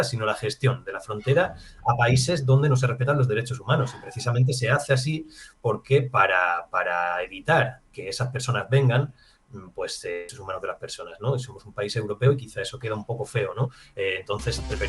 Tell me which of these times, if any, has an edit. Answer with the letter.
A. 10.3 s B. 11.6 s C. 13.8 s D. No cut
A